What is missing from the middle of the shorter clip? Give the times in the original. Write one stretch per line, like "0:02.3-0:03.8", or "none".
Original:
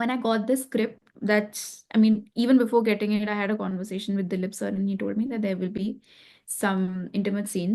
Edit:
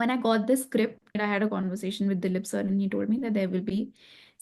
0:01.2-0:03.2